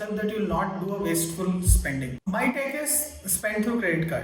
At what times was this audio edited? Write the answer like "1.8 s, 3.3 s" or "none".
2.2 s